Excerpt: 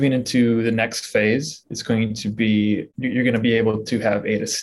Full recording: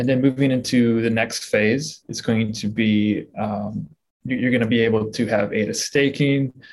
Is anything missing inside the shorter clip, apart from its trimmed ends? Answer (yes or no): yes